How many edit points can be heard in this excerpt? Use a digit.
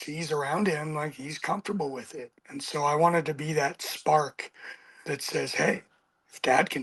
0